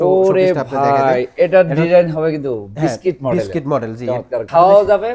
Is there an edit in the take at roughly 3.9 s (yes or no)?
no